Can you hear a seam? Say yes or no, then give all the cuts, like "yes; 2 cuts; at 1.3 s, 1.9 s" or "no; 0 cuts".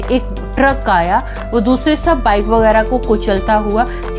yes; 1 cut; at 1.4 s